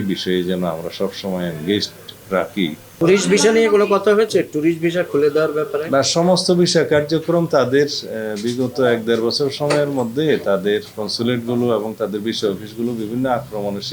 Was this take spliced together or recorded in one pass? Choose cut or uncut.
cut